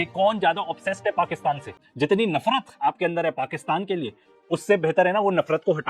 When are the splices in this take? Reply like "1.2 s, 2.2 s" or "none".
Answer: 1.8 s